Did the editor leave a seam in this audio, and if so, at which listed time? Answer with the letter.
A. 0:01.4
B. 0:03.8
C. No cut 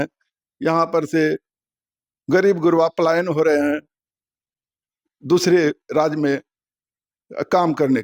C